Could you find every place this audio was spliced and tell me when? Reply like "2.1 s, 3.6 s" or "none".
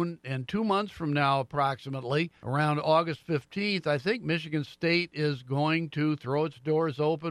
2.4 s

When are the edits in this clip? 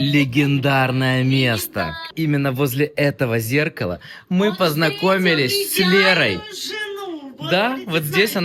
2.1 s

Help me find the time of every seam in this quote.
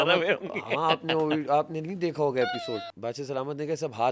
2.9 s

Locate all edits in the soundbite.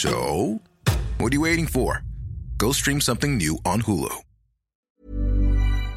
4.9 s

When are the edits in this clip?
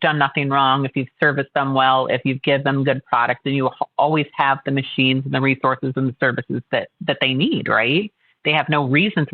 none

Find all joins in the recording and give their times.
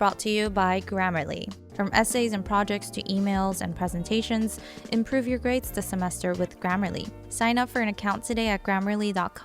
1.6 s

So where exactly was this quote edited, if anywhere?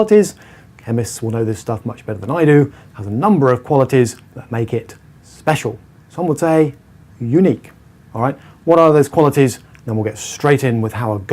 1.7 s

